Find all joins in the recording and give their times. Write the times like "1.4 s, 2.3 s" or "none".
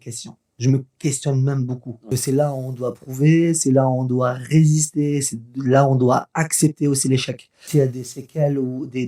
2.1 s, 7.6 s